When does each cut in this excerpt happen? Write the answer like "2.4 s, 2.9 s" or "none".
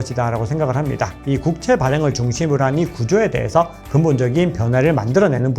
1.2 s

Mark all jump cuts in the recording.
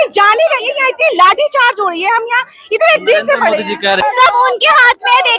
none

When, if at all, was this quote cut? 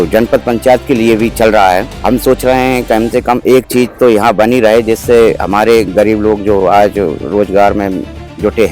1.9 s

